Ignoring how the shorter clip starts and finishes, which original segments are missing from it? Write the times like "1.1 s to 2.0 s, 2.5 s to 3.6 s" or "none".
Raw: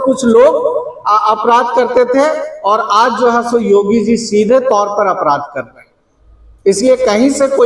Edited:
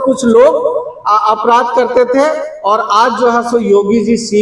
none